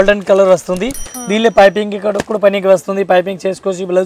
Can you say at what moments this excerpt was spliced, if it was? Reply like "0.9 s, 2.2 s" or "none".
none